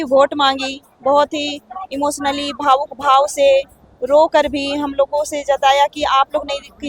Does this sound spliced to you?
no; 0 cuts

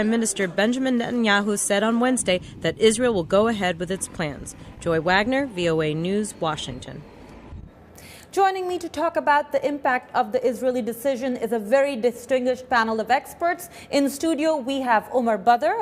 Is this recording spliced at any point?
yes; 1 cut; at 3.0 s

